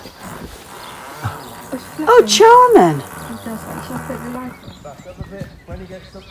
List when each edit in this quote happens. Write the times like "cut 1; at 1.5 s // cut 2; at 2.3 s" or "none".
cut 1; at 4.7 s